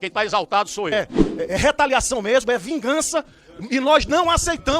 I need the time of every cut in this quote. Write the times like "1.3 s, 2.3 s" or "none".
0.9 s